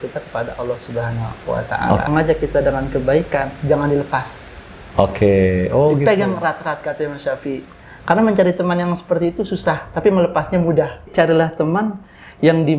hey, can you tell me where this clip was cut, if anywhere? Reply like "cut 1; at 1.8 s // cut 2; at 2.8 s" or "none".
cut 1; at 2.1 s // cut 2; at 11.1 s